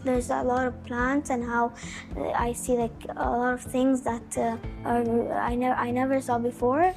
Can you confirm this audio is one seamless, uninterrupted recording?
yes; 0 cuts

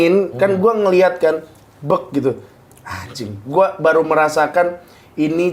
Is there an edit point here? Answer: no; 0 cuts

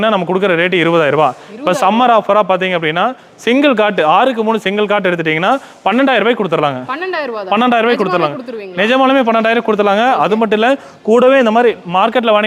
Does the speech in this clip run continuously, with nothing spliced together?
yes; 0 cuts

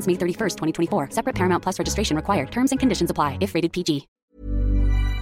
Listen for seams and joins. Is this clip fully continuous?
no; 1 cut; at 4.1 s

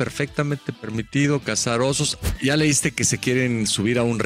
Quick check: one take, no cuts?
no; 1 cut; at 2.1 s

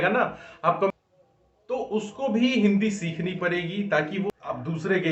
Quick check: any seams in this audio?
yes; 2 cuts; at 0.9 s, 4.3 s

